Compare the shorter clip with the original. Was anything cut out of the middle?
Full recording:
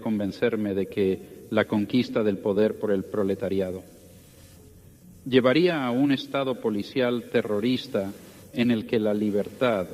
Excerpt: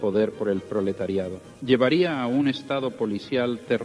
yes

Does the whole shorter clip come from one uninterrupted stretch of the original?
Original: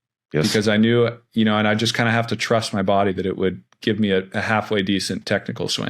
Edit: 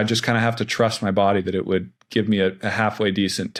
yes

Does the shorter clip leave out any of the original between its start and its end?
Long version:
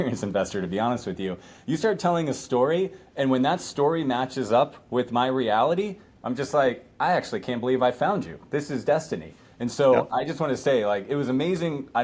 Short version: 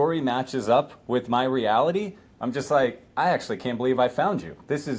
no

